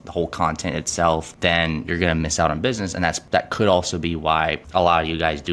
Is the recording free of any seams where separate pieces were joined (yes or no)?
no